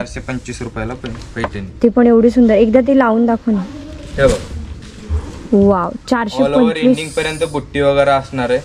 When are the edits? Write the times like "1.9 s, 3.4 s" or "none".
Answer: none